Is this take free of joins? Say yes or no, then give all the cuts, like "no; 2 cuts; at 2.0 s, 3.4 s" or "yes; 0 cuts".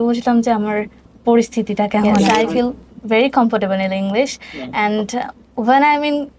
no; 1 cut; at 2.3 s